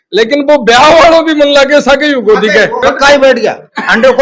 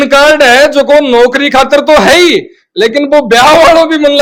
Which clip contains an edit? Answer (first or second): first